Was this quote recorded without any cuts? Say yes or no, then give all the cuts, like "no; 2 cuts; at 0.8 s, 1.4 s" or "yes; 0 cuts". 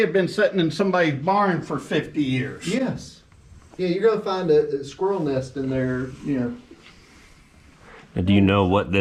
yes; 0 cuts